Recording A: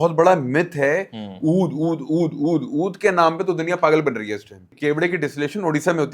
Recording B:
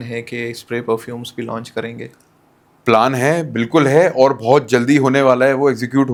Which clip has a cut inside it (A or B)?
A